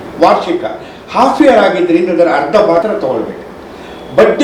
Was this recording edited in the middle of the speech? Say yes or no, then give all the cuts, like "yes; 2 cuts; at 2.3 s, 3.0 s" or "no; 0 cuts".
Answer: yes; 1 cut; at 2.8 s